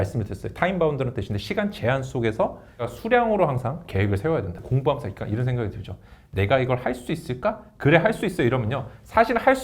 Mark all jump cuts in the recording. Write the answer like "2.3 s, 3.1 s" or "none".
2.9 s, 4.3 s